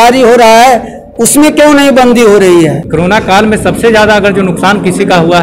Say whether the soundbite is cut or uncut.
cut